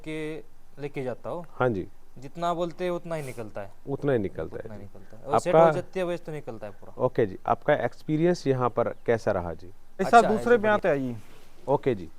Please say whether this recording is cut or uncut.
cut